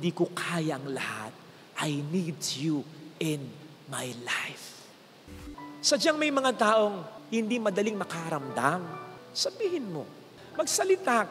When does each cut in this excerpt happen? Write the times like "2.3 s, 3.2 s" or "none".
5.3 s